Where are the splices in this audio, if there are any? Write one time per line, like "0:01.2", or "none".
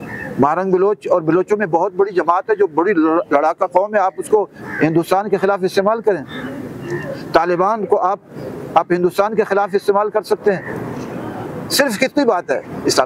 none